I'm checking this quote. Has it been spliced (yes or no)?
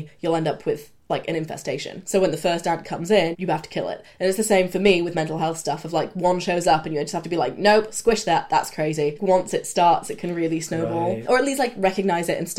yes